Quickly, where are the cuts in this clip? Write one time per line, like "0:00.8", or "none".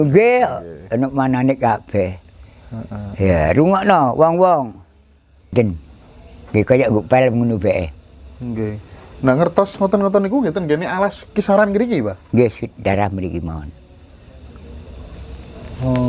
0:05.5